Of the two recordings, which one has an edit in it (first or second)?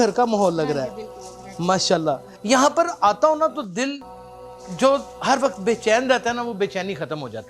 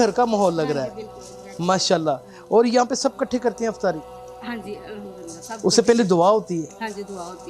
first